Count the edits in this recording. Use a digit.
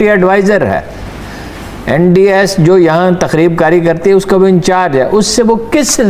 0